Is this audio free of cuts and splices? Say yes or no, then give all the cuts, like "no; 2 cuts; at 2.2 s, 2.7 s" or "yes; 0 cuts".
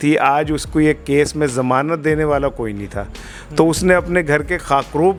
yes; 0 cuts